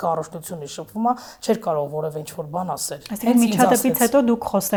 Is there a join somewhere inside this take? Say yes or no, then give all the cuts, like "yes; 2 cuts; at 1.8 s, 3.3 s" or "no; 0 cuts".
no; 0 cuts